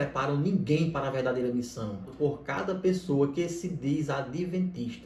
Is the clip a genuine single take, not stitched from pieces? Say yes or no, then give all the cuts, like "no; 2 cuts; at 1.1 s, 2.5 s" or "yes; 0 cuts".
no; 1 cut; at 2.1 s